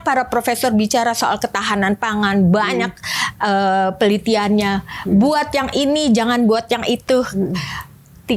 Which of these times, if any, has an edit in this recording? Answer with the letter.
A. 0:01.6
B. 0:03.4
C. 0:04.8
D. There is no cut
D